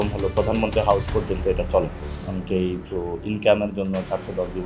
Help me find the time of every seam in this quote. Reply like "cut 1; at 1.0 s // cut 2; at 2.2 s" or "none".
cut 1; at 2.0 s // cut 2; at 2.8 s

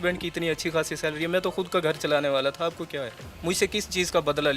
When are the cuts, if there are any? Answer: none

